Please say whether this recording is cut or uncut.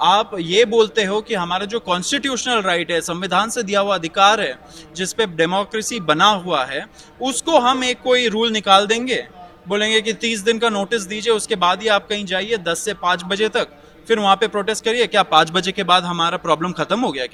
uncut